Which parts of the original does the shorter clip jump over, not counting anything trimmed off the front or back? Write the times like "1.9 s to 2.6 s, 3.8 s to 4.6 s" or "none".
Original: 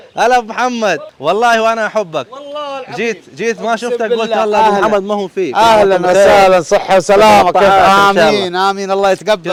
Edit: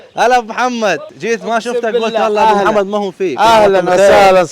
1.1 s to 3.3 s